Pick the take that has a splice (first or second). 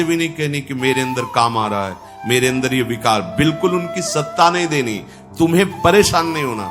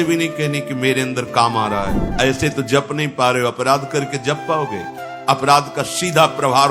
second